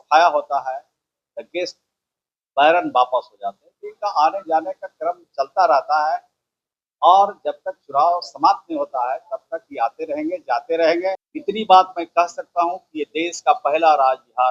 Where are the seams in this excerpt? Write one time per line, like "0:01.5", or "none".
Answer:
0:11.3